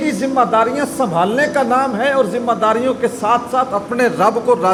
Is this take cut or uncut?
uncut